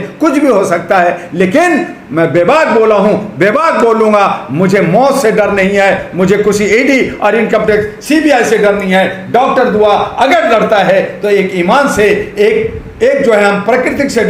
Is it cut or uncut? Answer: uncut